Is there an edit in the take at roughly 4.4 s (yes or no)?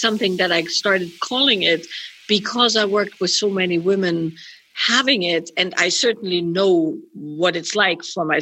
no